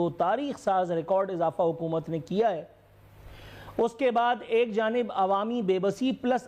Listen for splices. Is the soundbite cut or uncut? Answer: uncut